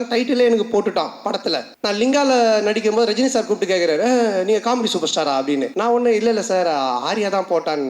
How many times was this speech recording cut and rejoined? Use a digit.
2